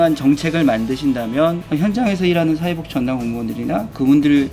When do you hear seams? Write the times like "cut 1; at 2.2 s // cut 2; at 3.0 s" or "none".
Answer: cut 1; at 1.6 s